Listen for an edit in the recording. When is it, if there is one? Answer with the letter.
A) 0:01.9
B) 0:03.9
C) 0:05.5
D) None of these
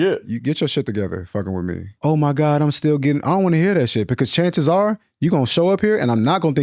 A